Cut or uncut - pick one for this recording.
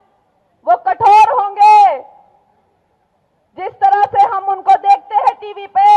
uncut